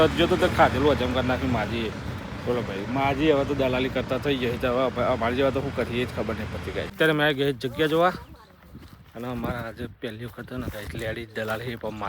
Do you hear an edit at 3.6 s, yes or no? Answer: no